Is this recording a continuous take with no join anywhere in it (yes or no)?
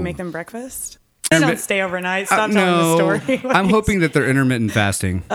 no